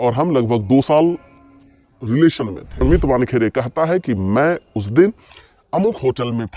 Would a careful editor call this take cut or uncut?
cut